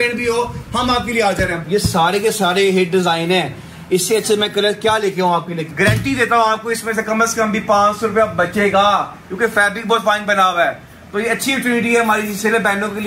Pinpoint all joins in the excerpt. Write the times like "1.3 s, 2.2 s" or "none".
1.6 s, 5.6 s